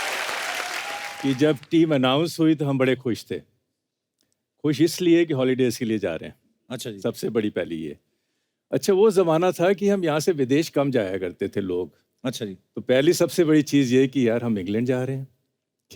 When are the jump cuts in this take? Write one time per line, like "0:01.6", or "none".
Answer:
0:01.1